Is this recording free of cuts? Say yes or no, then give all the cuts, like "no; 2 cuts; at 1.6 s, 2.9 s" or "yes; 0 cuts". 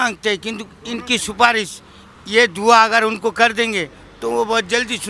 yes; 0 cuts